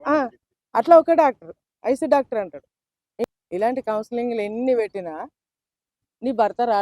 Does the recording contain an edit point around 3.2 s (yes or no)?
yes